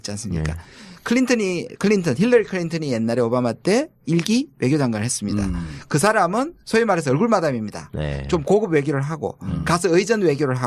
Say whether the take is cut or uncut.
cut